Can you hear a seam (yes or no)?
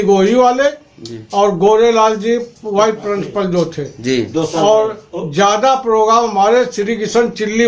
no